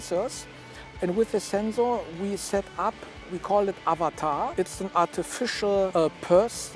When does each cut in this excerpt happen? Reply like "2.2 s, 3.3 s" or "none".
3.3 s, 4.5 s, 5.9 s